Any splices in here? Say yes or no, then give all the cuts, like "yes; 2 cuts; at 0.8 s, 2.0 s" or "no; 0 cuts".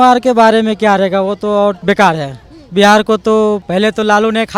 yes; 2 cuts; at 1.8 s, 3.6 s